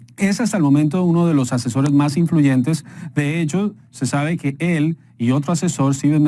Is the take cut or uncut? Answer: cut